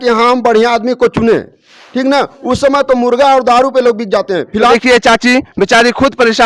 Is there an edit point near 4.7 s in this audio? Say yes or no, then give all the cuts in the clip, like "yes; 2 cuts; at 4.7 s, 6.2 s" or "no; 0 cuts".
yes; 1 cut; at 4.7 s